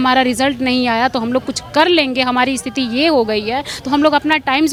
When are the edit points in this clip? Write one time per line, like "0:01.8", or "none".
none